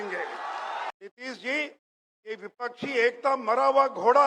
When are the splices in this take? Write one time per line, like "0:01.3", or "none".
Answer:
0:00.9

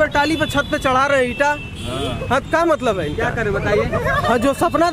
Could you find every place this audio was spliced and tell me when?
none

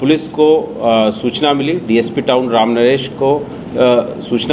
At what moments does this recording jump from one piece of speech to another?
none

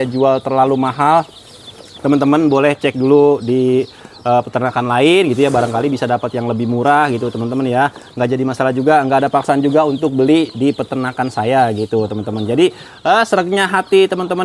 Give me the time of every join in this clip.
none

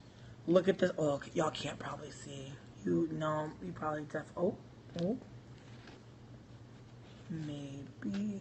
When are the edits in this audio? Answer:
0:06.0

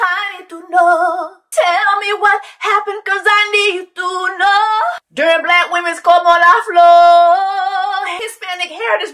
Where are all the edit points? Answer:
0:01.4

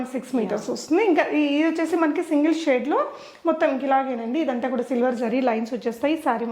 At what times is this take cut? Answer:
none

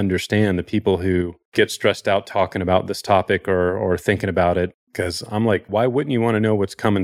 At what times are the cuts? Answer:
0:01.4
0:05.7

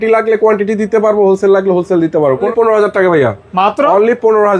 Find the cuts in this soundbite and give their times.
0:02.5

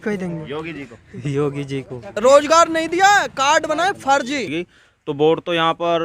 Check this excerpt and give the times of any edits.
0:02.2
0:04.5

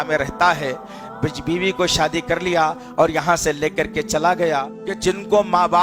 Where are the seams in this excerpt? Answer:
0:04.8

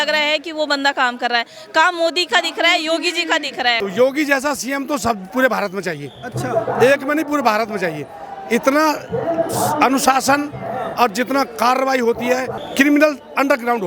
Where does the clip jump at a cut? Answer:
0:03.8
0:12.6

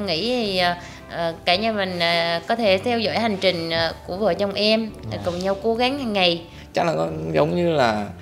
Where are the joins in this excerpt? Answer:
0:06.5

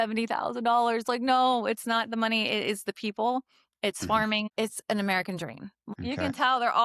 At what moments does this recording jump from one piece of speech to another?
0:04.5
0:05.8

